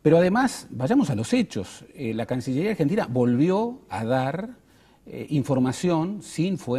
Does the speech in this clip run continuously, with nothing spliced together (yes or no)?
no